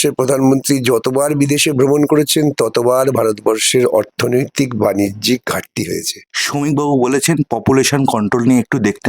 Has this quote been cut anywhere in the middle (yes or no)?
yes